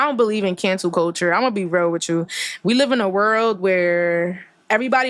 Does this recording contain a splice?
no; 0 cuts

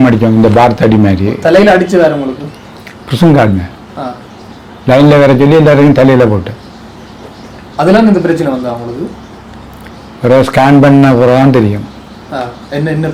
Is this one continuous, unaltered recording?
yes; 0 cuts

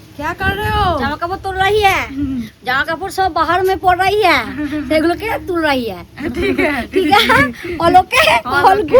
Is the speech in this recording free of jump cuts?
yes; 0 cuts

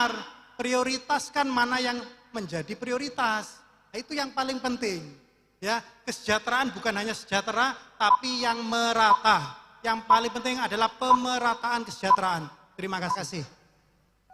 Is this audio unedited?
yes; 0 cuts

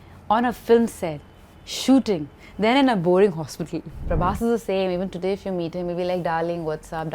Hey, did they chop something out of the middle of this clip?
yes; 1 cut; at 4.0 s

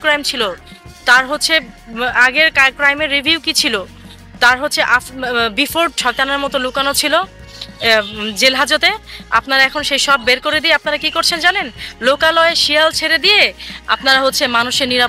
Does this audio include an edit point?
yes; 1 cut; at 6.0 s

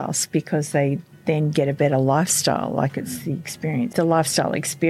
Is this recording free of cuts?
no; 1 cut; at 3.9 s

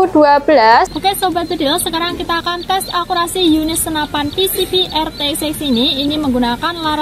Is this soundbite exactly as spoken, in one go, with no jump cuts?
no; 1 cut; at 0.9 s

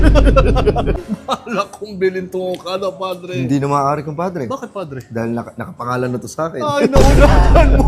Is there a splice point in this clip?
yes; 1 cut; at 1.0 s

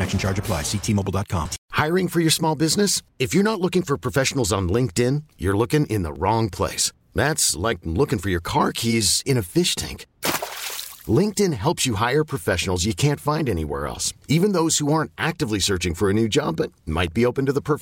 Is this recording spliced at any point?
yes; 1 cut; at 1.6 s

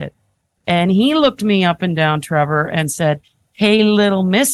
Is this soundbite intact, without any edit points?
yes; 0 cuts

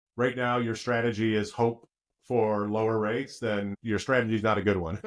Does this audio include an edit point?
yes; 1 cut; at 3.8 s

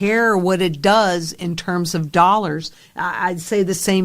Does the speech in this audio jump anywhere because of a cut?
no; 0 cuts

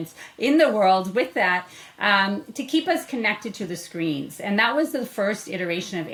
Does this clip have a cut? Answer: no; 0 cuts

